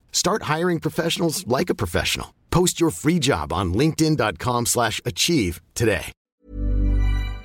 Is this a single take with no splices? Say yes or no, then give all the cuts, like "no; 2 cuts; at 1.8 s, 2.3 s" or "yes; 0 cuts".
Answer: no; 1 cut; at 6.2 s